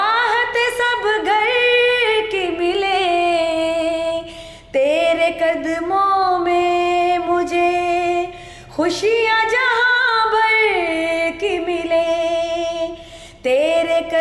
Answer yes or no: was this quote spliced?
no